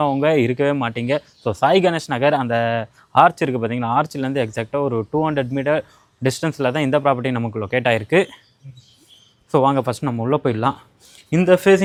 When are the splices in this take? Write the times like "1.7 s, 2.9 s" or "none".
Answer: none